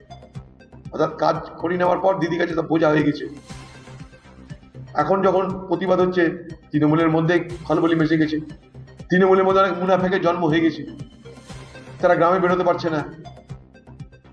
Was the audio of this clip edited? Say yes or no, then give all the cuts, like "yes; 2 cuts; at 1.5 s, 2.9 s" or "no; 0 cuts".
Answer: yes; 1 cut; at 13.2 s